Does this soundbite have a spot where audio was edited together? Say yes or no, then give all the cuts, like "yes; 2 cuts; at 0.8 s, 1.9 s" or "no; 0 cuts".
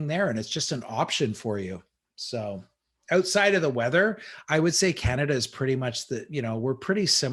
no; 0 cuts